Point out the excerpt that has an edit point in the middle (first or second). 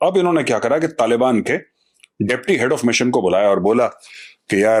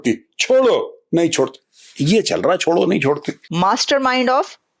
second